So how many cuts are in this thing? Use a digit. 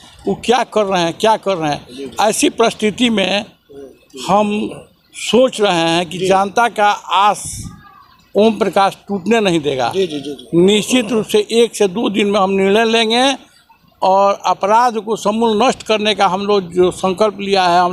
0